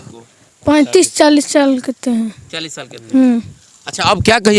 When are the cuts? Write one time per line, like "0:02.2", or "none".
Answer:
none